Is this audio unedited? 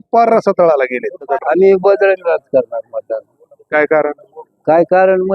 no; 1 cut; at 1.2 s

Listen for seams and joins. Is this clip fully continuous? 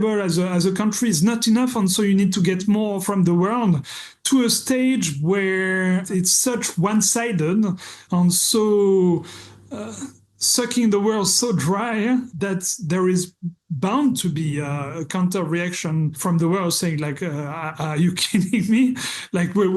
no; 5 cuts; at 3.0 s, 6.1 s, 8.0 s, 12.3 s, 16.2 s

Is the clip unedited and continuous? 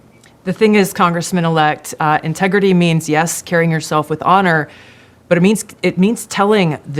yes; 0 cuts

